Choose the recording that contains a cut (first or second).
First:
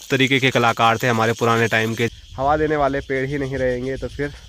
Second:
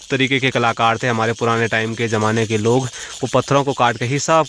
first